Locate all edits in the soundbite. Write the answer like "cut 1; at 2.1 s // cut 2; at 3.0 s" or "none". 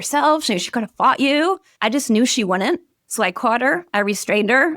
cut 1; at 1.7 s // cut 2; at 3.0 s